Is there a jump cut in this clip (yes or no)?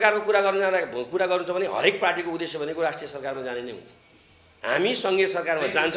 no